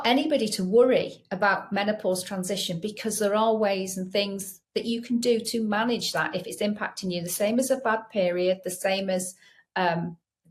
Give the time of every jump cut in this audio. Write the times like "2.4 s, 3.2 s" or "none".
none